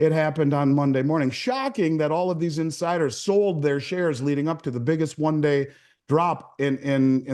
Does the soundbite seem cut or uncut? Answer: uncut